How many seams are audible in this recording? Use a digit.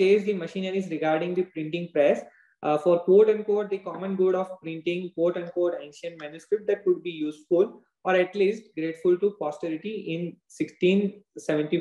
0